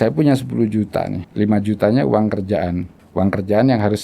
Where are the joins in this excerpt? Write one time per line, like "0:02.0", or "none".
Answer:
0:01.2
0:03.0